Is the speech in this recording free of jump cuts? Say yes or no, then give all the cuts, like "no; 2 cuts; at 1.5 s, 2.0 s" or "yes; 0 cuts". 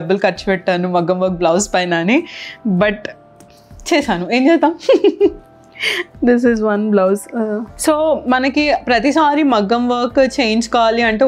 yes; 0 cuts